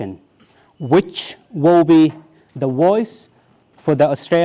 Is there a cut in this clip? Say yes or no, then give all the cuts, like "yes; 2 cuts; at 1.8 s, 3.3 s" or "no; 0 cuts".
no; 0 cuts